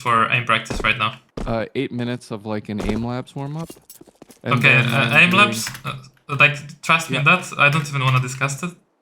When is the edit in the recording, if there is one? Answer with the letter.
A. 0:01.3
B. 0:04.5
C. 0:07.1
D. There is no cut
A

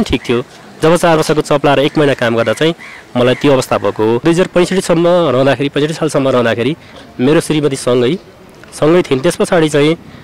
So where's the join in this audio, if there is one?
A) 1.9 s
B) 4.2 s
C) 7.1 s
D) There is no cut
B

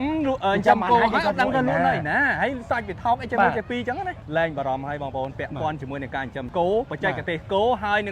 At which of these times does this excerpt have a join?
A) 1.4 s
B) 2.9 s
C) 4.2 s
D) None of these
C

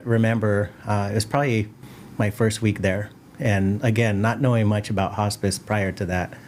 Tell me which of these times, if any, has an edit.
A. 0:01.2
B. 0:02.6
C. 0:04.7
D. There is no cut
D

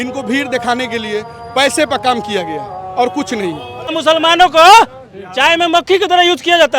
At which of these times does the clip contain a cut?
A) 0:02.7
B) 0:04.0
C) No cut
B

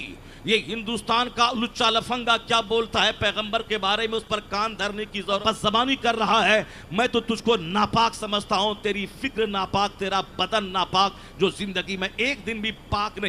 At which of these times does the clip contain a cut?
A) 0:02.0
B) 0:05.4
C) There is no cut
B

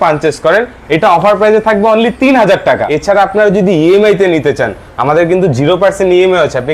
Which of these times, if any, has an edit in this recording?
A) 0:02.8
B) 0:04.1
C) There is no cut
A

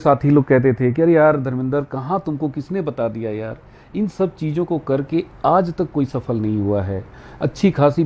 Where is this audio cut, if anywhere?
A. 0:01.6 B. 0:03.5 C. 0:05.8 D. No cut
D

